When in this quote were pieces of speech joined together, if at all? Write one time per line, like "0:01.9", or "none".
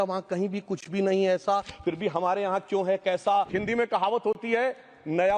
0:03.5